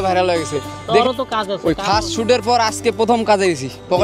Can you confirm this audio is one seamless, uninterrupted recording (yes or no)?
no